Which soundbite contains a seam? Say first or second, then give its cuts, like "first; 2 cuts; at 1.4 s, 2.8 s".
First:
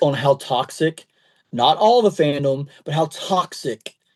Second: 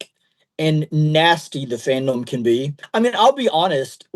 second; 1 cut; at 2.8 s